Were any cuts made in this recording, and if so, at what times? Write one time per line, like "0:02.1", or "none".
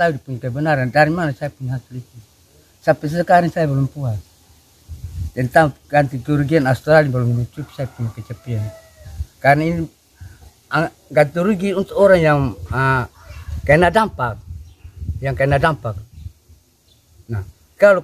none